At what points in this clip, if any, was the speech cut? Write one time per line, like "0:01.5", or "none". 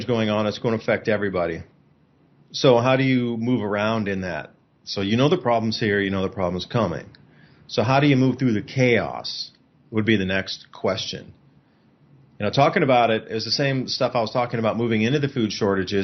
none